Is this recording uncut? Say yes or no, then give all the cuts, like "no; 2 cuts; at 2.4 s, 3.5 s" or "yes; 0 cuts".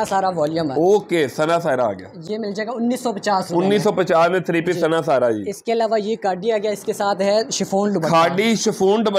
yes; 0 cuts